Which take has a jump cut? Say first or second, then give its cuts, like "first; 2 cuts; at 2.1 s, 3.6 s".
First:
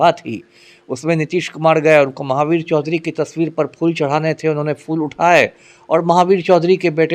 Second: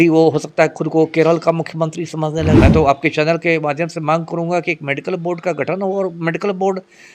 second; 1 cut; at 2.6 s